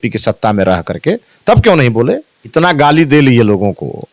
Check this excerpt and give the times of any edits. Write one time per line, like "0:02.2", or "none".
0:02.4